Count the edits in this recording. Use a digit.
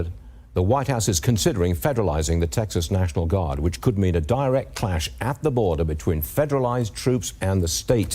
0